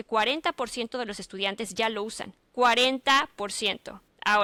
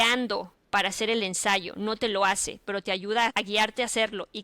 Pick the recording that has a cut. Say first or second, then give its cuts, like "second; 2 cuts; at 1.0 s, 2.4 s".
second; 1 cut; at 3.3 s